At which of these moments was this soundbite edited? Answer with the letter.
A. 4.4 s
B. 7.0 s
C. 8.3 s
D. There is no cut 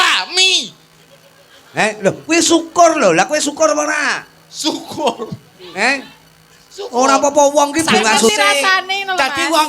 C